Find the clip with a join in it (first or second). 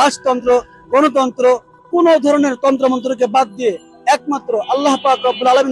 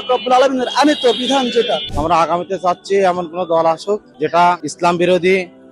second